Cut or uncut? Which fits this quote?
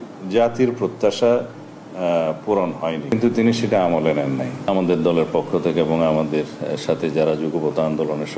cut